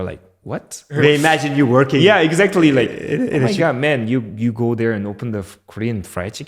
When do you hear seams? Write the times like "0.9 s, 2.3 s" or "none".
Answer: 0.9 s